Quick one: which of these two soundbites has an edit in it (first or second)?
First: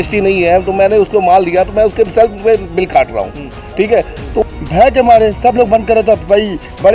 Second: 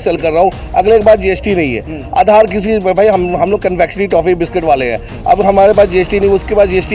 first